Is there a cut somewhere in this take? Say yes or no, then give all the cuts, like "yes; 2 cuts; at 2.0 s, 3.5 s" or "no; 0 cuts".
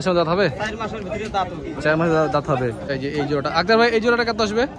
yes; 1 cut; at 2.9 s